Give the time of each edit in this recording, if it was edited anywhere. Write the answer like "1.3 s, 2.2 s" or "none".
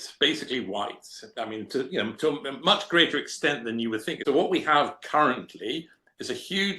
4.1 s